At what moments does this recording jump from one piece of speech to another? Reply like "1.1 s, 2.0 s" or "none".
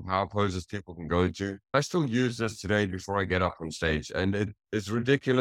1.7 s